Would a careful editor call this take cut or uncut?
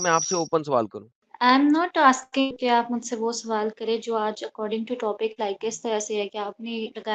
uncut